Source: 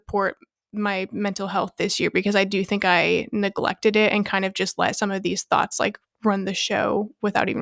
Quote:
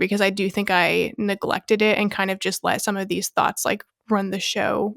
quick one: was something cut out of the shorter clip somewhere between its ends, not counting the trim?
no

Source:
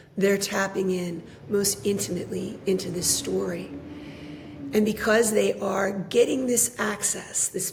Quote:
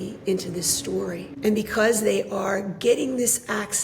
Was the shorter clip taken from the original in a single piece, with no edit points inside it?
no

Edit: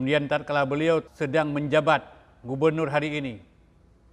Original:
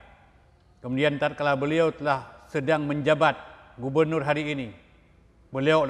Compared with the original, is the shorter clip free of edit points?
no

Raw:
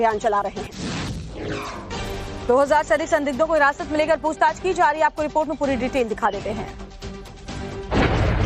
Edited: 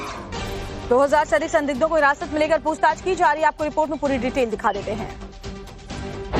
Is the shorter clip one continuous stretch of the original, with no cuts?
yes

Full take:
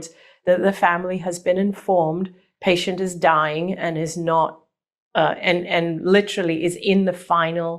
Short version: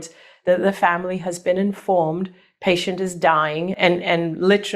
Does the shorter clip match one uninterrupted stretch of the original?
no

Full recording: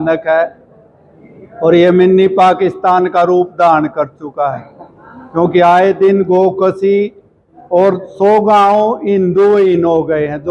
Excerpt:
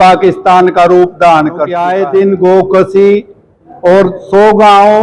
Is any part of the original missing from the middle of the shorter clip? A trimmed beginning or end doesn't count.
yes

